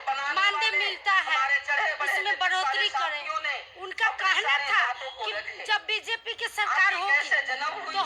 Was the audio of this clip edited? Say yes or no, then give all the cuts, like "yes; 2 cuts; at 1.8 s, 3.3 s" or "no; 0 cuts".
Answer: no; 0 cuts